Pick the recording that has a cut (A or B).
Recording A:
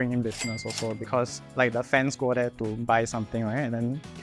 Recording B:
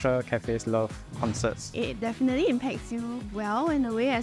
B